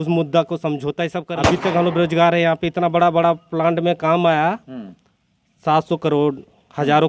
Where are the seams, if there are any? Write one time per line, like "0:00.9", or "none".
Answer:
0:01.3

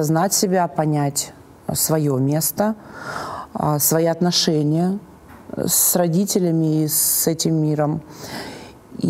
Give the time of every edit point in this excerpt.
none

